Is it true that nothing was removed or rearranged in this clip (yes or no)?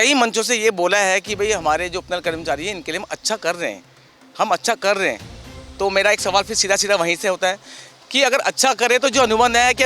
yes